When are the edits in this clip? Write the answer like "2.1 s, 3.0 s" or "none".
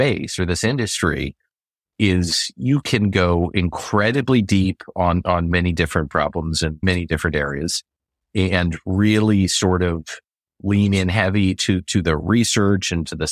5.5 s, 6.8 s

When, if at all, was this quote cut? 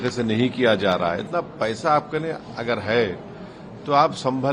1.3 s

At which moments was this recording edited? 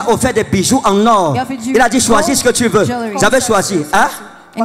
none

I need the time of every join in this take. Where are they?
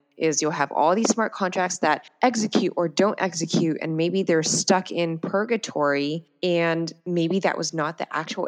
none

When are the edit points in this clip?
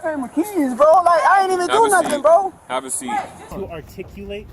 3.0 s

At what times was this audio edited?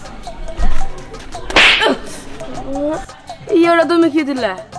none

